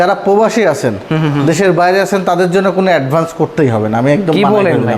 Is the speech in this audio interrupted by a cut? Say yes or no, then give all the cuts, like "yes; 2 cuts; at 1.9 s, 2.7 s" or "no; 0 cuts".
no; 0 cuts